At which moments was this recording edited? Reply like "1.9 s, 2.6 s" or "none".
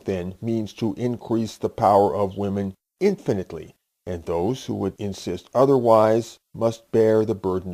1.9 s